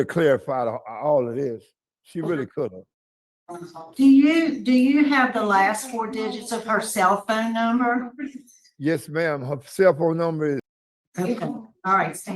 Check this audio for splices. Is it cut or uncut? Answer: cut